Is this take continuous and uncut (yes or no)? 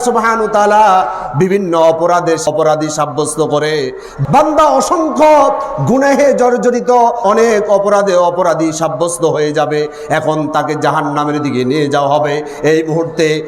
no